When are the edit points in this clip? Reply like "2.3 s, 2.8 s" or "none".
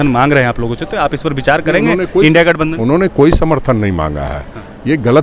none